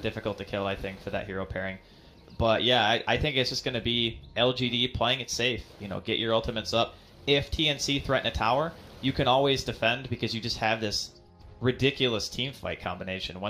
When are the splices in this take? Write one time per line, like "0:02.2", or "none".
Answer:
0:05.7